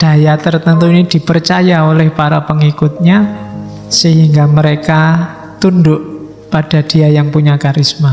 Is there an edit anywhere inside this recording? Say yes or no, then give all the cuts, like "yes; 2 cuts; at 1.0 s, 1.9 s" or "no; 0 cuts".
no; 0 cuts